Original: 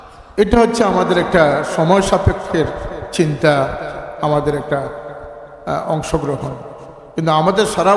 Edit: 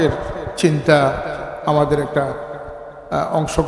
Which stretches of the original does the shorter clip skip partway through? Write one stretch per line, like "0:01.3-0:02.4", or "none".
none